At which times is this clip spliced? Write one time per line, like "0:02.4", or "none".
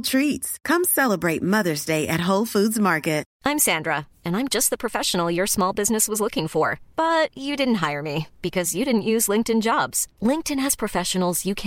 none